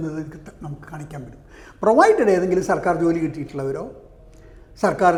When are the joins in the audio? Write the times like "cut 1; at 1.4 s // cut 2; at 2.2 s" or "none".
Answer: none